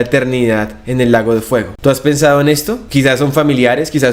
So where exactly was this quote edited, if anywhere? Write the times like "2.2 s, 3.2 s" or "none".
1.7 s, 2.8 s